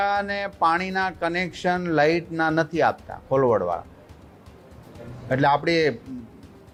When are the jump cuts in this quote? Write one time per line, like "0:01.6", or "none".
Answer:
none